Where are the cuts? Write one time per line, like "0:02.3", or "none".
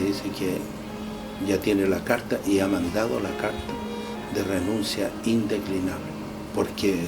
0:06.1